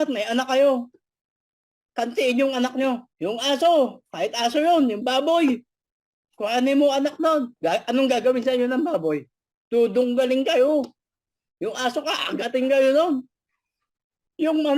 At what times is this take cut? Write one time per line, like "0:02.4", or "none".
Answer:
0:03.1
0:07.5